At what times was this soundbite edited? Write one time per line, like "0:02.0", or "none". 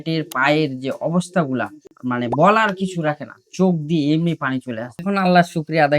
0:05.0

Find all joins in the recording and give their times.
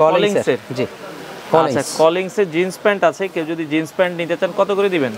none

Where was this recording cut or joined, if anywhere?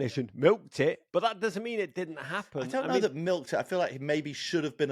0:01.0

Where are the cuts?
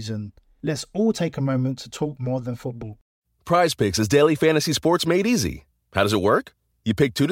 0:02.9

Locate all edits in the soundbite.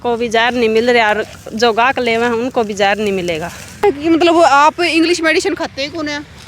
0:03.8

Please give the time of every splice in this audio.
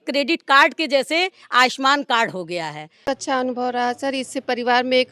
0:03.0

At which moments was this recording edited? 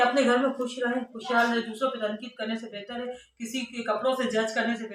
none

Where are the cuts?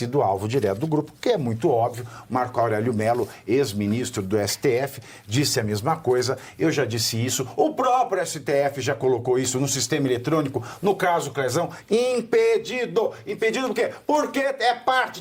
none

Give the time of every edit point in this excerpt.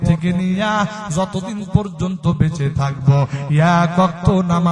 none

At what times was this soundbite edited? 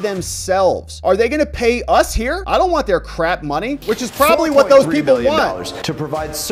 0:03.8

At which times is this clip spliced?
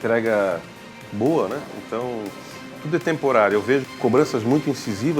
0:03.9

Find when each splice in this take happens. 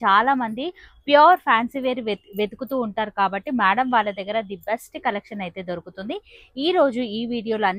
none

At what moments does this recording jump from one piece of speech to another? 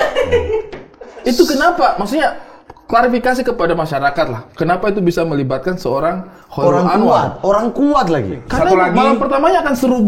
0:08.4

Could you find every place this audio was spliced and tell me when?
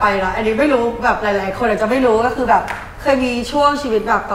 none

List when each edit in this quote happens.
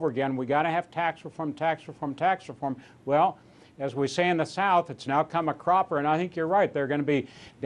0:01.5

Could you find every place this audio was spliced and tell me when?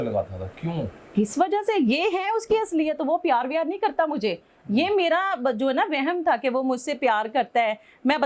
none

